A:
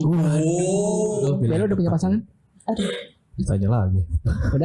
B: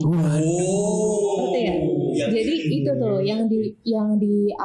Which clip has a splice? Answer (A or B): A